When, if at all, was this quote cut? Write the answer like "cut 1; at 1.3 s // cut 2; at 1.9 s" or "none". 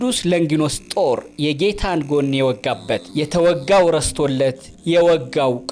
none